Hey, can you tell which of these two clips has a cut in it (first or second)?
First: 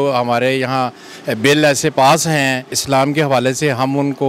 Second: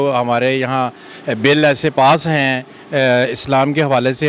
first